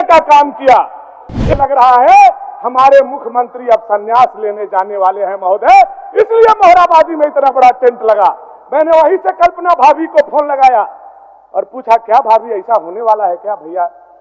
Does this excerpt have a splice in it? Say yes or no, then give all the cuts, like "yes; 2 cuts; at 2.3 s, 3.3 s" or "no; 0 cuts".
yes; 1 cut; at 1.6 s